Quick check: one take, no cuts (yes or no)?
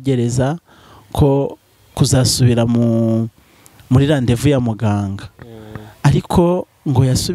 yes